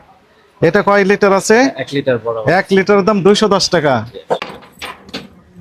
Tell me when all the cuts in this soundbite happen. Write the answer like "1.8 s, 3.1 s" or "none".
4.5 s